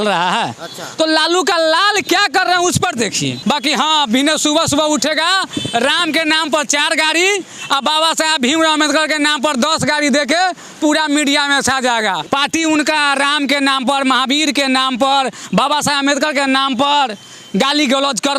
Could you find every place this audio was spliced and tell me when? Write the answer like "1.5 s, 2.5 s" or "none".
3.4 s, 12.2 s